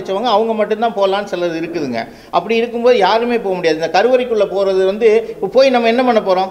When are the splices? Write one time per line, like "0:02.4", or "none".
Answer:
none